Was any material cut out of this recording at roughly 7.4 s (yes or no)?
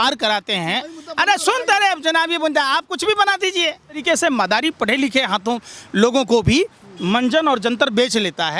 no